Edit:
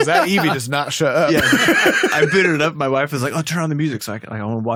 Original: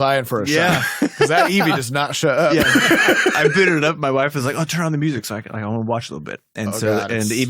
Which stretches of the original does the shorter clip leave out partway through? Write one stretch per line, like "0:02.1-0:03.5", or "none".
none